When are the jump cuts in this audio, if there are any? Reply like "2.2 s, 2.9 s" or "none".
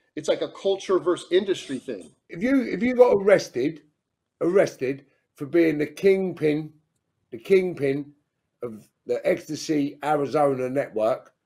2.3 s